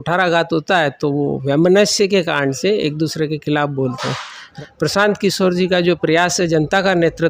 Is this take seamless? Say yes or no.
no